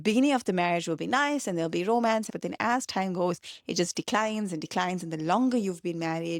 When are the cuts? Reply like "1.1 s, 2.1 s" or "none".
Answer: 2.3 s